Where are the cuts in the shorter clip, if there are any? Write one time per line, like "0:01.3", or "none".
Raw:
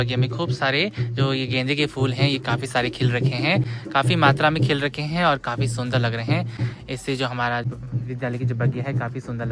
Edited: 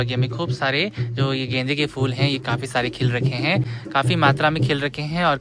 none